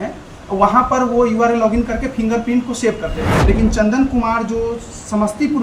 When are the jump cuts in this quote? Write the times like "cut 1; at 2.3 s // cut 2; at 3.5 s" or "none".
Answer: cut 1; at 3.3 s

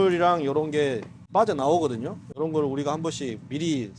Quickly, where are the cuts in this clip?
cut 1; at 2.3 s

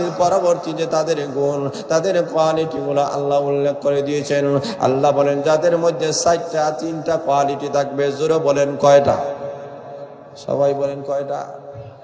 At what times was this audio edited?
none

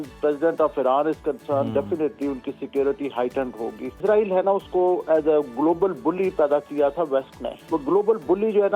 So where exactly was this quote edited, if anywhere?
cut 1; at 4.0 s // cut 2; at 7.7 s

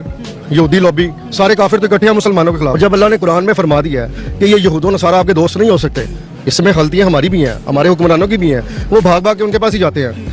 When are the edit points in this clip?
none

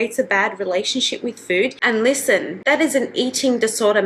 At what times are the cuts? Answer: cut 1; at 1.8 s

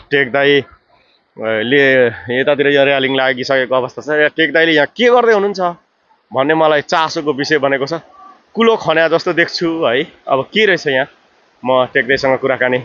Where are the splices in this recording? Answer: none

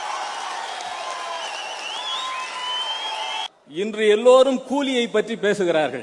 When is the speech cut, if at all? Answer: cut 1; at 3.5 s

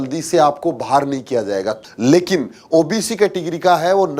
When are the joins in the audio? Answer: cut 1; at 1.8 s

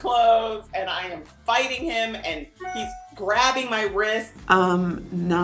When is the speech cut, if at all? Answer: cut 1; at 4.3 s

